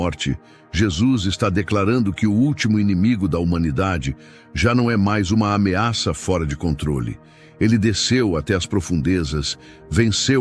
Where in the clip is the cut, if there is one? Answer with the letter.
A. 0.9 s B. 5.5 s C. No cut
C